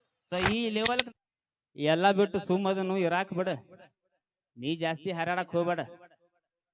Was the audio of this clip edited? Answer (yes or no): yes